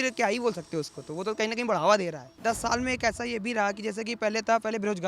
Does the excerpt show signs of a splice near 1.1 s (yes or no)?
no